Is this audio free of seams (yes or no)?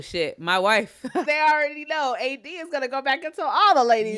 no